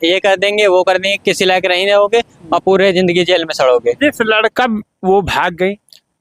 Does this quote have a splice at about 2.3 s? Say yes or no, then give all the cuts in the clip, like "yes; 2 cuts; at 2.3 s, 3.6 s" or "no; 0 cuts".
no; 1 cut; at 4.5 s